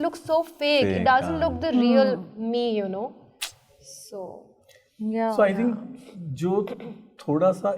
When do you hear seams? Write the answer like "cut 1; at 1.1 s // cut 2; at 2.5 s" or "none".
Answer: none